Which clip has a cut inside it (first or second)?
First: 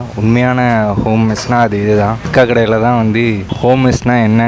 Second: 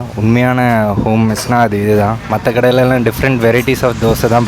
first